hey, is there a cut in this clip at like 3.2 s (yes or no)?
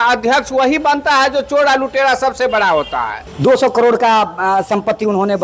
yes